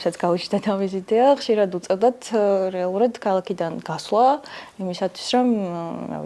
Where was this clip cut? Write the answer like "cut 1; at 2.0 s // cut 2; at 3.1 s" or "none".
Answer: none